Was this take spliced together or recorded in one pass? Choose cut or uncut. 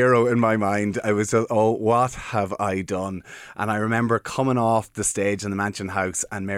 uncut